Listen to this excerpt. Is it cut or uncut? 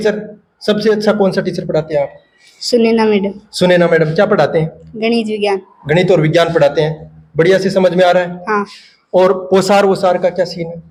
uncut